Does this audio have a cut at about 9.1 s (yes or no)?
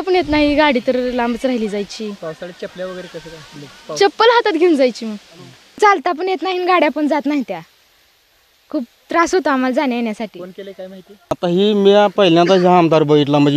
no